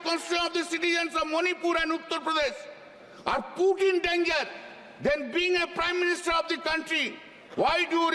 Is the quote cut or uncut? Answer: uncut